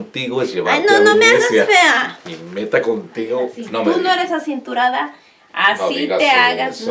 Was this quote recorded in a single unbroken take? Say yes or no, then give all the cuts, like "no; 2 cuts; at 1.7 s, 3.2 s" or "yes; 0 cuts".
no; 1 cut; at 3.6 s